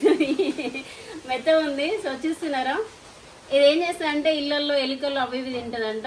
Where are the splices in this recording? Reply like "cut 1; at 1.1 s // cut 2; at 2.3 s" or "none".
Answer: none

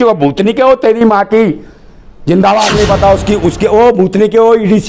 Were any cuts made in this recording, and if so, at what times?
cut 1; at 2.7 s

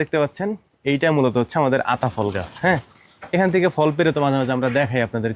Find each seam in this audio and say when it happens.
none

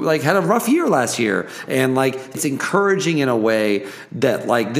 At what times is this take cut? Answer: cut 1; at 2.4 s

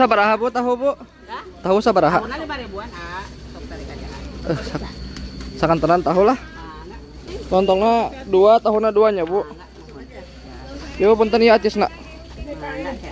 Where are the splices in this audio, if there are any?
none

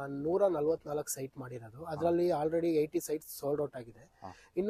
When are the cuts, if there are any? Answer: none

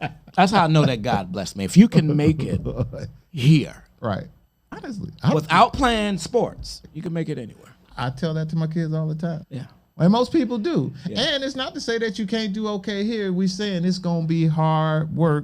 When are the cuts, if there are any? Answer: cut 1; at 9.4 s

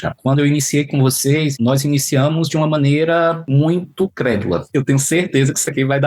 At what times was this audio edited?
cut 1; at 1.5 s // cut 2; at 3.4 s // cut 3; at 4.7 s

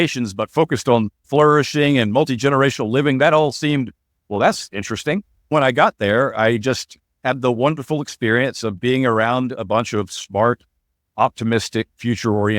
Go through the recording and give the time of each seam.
cut 1; at 1.2 s // cut 2; at 5.5 s

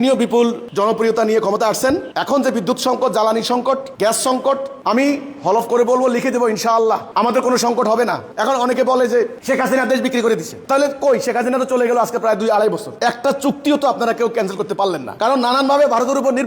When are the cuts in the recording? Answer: cut 1; at 12.9 s

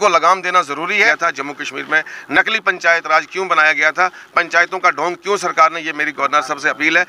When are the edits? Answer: cut 1; at 1.1 s

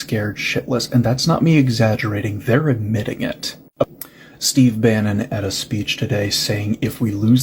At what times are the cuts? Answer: cut 1; at 3.9 s

